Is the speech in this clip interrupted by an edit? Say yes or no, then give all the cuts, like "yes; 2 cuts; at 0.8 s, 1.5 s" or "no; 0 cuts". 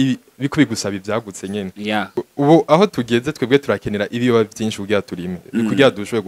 yes; 1 cut; at 2.1 s